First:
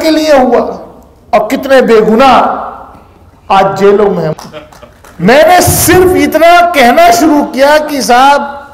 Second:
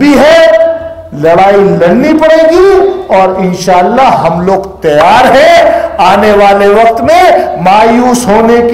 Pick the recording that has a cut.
first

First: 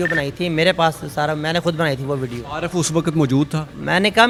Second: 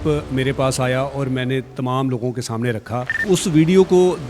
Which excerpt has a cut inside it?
second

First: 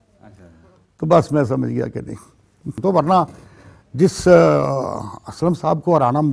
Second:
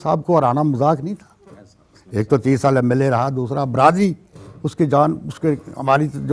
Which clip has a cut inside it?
first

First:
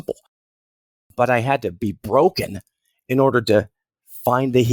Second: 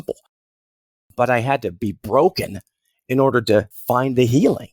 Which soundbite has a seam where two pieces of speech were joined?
second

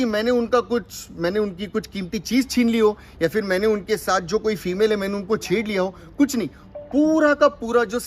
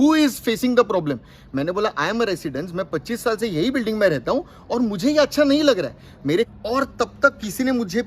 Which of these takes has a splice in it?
second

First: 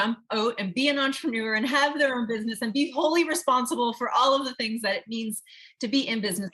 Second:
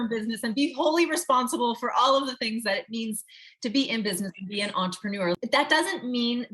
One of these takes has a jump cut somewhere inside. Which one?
second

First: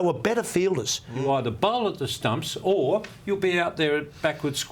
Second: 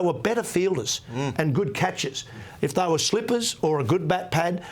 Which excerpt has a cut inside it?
first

